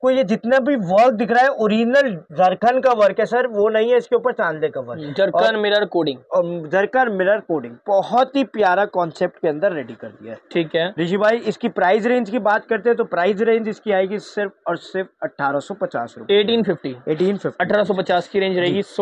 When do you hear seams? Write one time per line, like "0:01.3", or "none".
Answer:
none